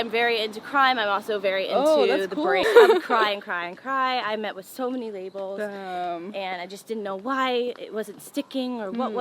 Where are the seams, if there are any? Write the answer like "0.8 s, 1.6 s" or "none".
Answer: 2.6 s

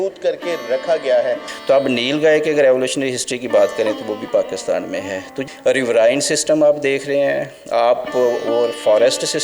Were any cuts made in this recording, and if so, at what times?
1.5 s, 5.4 s

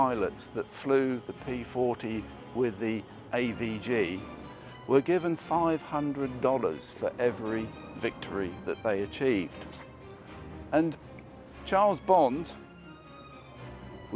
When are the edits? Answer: none

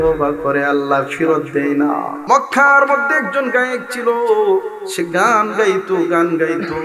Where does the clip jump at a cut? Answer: 2.1 s

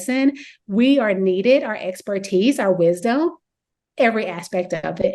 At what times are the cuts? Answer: none

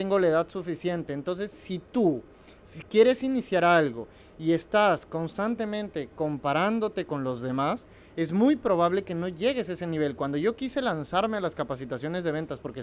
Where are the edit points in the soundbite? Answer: none

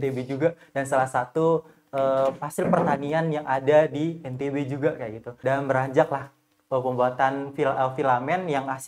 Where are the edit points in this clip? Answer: 5.2 s

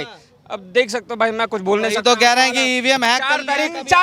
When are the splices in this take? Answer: none

